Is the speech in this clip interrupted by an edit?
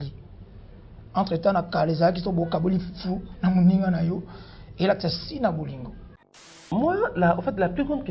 yes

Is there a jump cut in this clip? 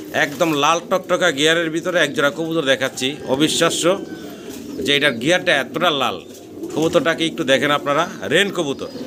no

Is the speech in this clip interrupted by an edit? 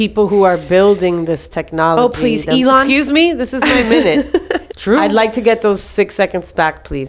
yes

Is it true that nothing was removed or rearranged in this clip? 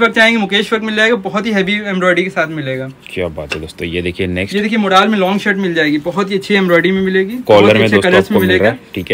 yes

